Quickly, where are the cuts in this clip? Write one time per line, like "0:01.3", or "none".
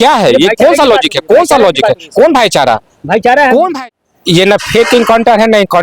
0:03.7

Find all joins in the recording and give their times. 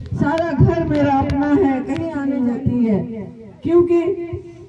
0:02.1

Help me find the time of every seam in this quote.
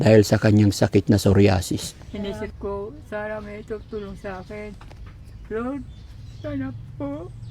0:02.0

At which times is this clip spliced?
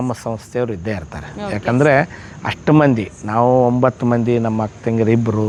none

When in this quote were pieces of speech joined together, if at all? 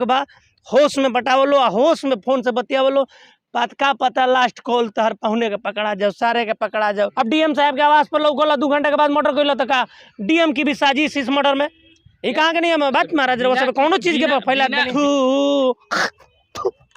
0:06.9
0:14.8

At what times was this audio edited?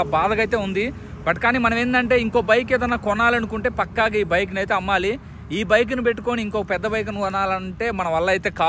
none

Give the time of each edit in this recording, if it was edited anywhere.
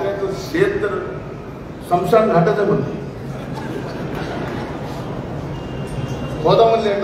none

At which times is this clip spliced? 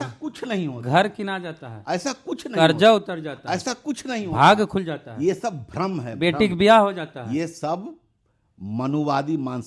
none

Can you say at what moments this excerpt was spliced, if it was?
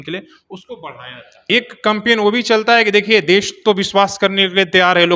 0:01.4

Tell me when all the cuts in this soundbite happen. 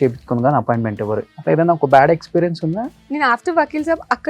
0:01.3
0:03.0

